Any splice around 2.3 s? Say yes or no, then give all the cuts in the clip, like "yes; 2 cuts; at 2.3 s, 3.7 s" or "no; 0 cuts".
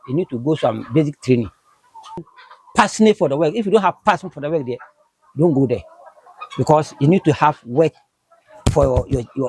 yes; 1 cut; at 2.3 s